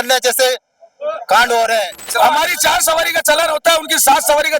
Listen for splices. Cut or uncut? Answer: cut